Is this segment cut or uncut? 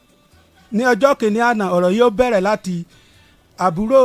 uncut